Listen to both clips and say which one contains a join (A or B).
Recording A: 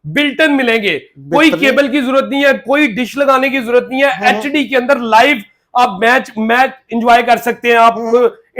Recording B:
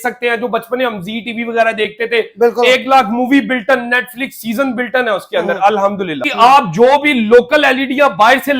B